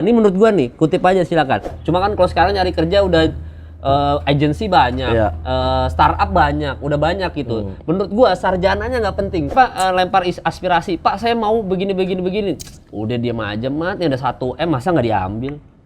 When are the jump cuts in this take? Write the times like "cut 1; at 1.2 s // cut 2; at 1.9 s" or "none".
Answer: cut 1; at 1.7 s // cut 2; at 9.5 s

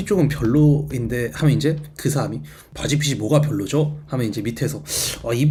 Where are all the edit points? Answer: none

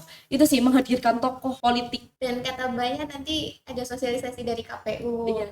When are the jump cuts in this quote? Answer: cut 1; at 1.7 s

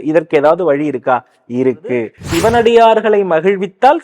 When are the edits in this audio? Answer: cut 1; at 2.2 s

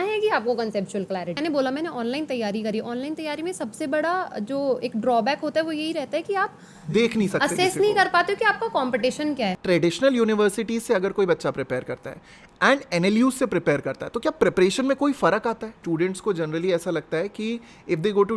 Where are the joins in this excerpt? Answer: cut 1; at 1.4 s // cut 2; at 9.6 s // cut 3; at 15.7 s

